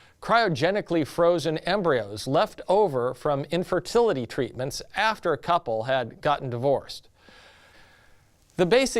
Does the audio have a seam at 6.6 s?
yes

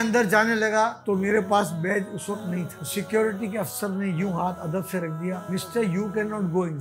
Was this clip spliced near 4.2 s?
no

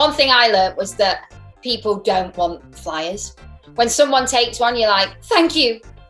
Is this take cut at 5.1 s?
yes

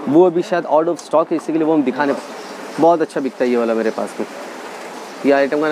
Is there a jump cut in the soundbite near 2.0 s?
yes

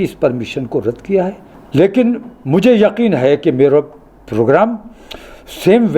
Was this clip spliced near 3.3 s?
no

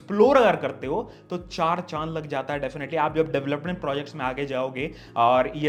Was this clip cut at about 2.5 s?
no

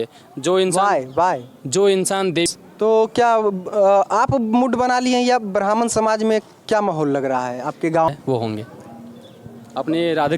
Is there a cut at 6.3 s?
no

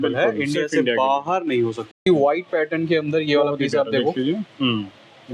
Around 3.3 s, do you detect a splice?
no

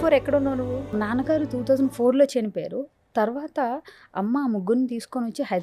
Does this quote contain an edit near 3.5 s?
no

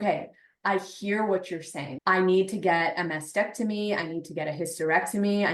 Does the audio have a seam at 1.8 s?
yes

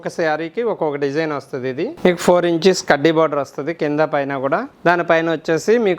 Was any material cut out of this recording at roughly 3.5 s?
no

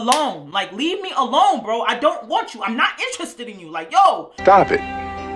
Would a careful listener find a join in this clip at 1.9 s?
no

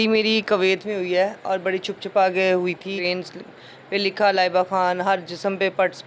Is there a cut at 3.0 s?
yes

